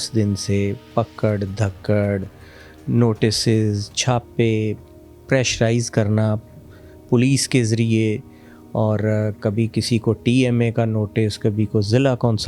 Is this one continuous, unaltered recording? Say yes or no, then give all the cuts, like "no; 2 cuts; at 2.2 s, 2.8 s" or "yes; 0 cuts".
yes; 0 cuts